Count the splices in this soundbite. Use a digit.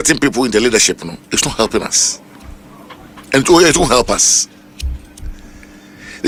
0